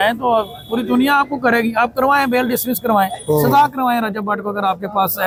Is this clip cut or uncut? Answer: uncut